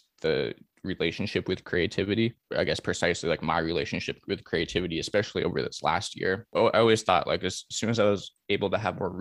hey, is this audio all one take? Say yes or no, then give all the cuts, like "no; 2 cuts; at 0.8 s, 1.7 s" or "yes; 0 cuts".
no; 2 cuts; at 2.4 s, 6.5 s